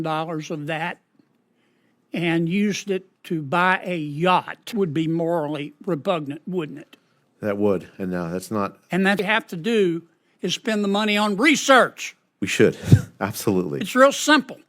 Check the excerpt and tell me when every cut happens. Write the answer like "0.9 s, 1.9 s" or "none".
4.7 s, 9.2 s